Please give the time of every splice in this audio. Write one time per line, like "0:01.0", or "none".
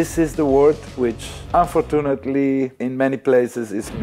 0:01.3
0:02.7